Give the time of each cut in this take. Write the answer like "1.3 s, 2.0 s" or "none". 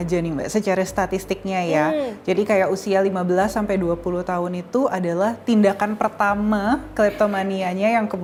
none